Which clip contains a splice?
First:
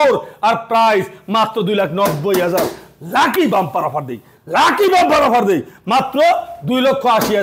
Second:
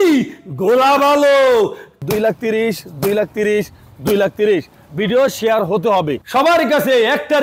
second; 2 cuts; at 1.9 s, 6.1 s

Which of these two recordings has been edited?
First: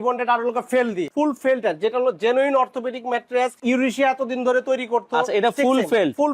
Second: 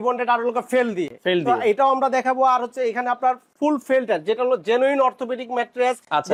first; 2 cuts; at 1.1 s, 3.6 s

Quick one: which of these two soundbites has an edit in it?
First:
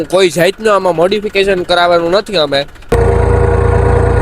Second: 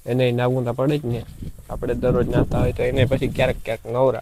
first; 1 cut; at 2.7 s

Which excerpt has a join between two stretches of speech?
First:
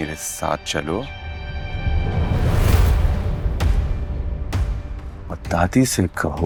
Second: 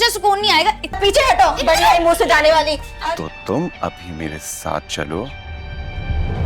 second; 2 cuts; at 1.0 s, 2.9 s

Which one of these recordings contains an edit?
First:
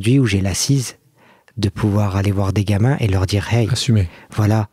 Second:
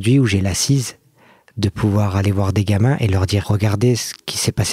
second; 1 cut; at 3.4 s

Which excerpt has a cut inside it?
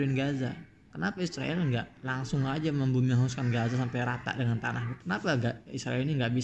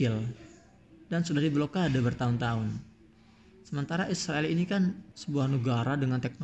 second; 1 cut; at 5.1 s

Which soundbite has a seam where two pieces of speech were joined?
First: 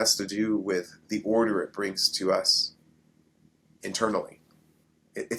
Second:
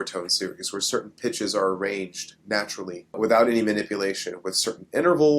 second; 1 cut; at 3.2 s

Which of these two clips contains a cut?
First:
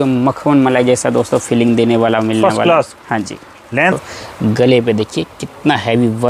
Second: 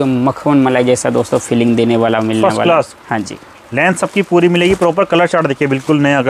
first; 1 cut; at 3.9 s

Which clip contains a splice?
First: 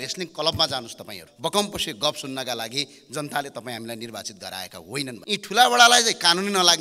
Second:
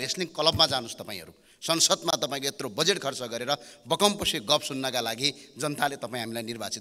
first; 2 cuts; at 1.3 s, 5.2 s

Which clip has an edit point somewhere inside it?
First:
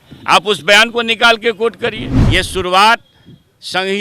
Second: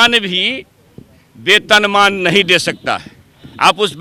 first; 1 cut; at 2.1 s

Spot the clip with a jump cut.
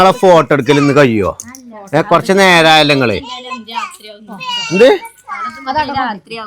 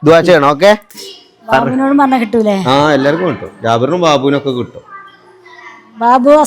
second; 1 cut; at 0.9 s

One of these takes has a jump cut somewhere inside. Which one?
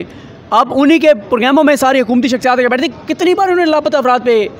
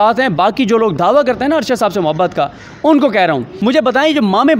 second; 1 cut; at 3.5 s

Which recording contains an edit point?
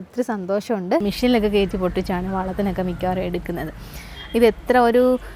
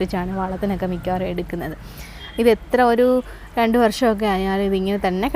first; 1 cut; at 1.0 s

